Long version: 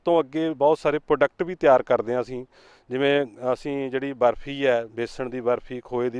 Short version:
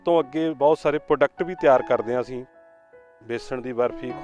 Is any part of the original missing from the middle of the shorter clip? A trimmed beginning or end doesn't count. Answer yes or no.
yes